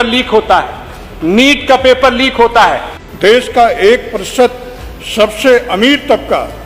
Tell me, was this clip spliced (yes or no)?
yes